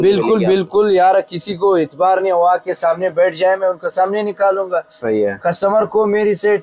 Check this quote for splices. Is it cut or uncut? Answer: uncut